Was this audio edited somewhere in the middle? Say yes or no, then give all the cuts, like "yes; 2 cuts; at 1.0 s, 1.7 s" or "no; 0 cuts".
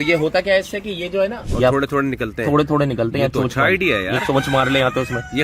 yes; 1 cut; at 1.4 s